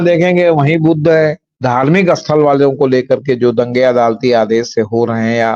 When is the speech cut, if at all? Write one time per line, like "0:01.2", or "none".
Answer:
0:01.5